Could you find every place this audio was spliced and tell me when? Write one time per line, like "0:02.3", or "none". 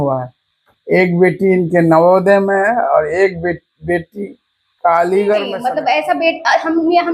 0:05.6